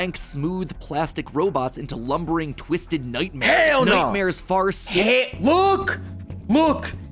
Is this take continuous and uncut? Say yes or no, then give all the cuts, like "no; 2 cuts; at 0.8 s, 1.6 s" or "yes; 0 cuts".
yes; 0 cuts